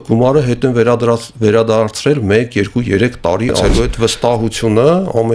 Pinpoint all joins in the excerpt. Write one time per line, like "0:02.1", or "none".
0:03.7